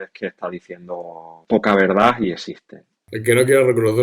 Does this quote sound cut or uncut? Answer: cut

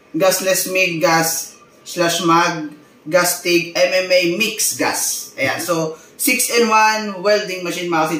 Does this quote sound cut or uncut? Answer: uncut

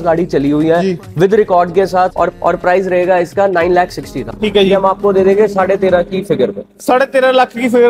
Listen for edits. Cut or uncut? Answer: cut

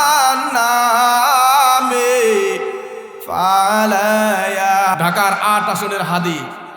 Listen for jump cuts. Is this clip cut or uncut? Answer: cut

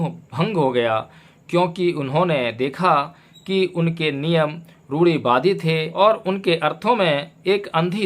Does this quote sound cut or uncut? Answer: cut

